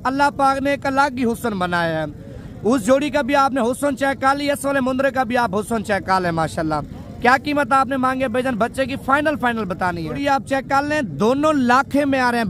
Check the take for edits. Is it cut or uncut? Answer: cut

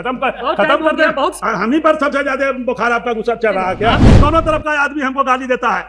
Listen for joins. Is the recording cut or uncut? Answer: cut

